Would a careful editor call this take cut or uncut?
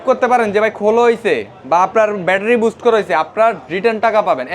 uncut